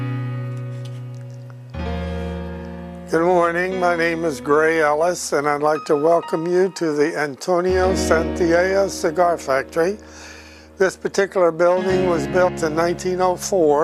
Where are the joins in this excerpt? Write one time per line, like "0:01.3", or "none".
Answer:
none